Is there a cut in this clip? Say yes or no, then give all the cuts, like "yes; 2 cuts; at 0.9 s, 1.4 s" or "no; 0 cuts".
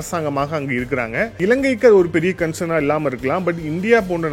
yes; 1 cut; at 1.4 s